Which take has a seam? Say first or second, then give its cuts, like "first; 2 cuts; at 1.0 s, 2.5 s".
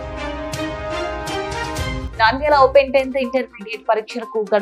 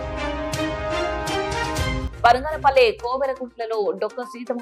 first; 1 cut; at 2.0 s